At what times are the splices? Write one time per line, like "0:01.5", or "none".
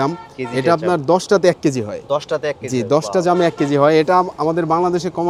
none